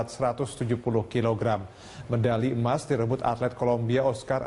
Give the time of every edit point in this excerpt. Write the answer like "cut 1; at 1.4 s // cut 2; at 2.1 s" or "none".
none